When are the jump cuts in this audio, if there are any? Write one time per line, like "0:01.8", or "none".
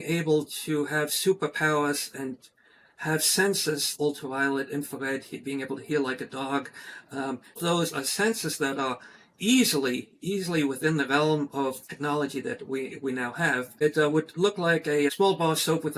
0:03.9
0:07.6
0:11.9
0:13.7
0:15.1